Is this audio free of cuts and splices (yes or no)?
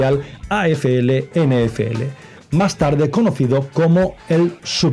yes